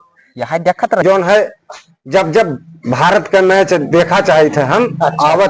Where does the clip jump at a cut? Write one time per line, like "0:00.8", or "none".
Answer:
0:01.0